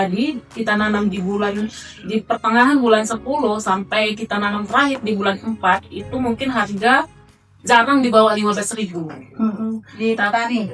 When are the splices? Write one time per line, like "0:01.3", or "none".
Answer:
none